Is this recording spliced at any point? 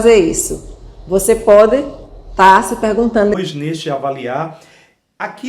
yes; 1 cut; at 3.3 s

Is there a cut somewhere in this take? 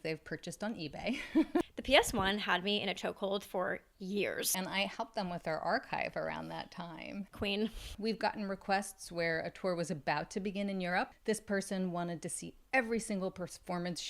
yes; 4 cuts; at 1.7 s, 4.5 s, 7.5 s, 11.1 s

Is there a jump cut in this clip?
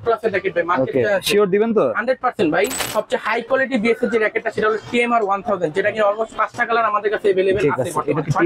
yes; 1 cut; at 2.8 s

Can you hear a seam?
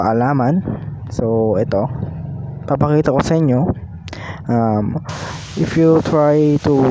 no; 0 cuts

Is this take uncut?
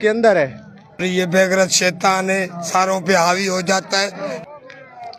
no; 2 cuts; at 1.0 s, 4.4 s

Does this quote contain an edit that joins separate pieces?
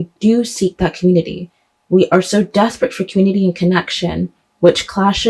no; 0 cuts

